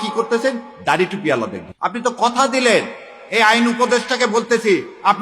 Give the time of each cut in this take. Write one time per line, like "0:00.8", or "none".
0:01.6

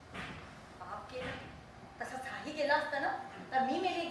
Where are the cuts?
none

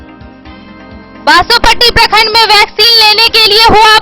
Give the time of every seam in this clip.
0:01.1

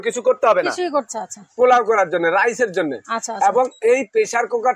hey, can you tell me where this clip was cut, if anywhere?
0:01.1

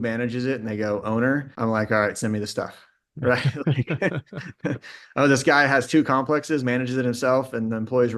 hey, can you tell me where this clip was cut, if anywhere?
0:01.5

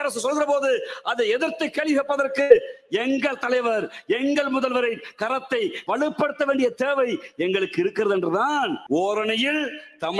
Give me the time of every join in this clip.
0:05.8
0:08.8

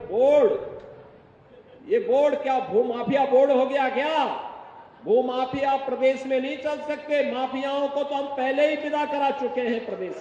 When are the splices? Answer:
none

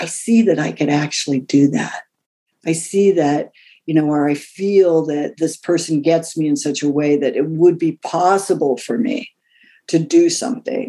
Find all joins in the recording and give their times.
none

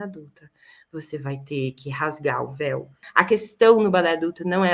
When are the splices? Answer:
0:03.0

